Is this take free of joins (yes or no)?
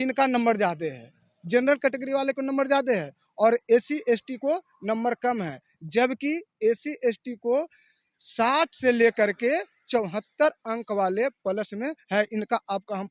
yes